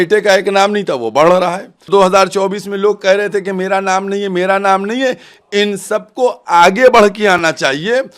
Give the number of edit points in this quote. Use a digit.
1